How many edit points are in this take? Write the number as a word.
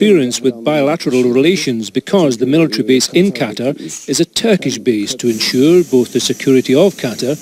zero